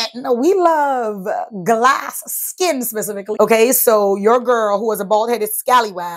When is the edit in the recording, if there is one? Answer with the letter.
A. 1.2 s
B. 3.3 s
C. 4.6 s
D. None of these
B